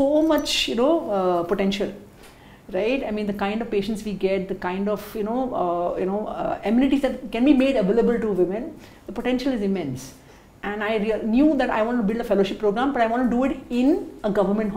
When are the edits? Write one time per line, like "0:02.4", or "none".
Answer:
none